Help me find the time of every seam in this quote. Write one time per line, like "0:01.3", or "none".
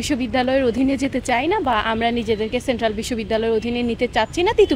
none